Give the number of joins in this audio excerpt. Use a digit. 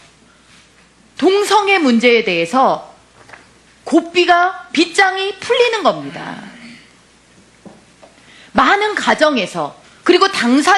1